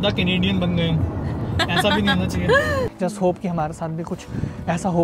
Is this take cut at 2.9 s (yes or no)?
yes